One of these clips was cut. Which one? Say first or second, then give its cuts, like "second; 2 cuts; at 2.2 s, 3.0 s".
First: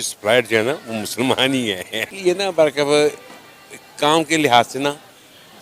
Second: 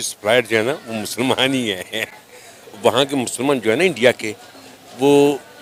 first; 1 cut; at 2.1 s